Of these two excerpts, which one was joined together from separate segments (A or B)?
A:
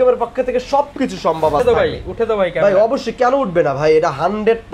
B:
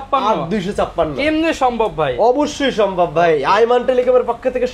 A